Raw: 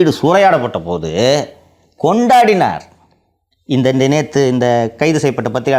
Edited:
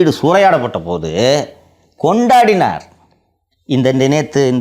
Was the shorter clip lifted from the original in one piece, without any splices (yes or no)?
yes